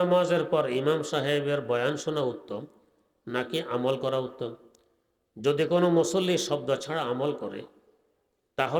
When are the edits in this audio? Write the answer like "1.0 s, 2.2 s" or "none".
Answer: none